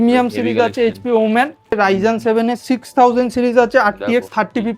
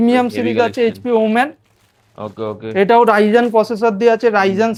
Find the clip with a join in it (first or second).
first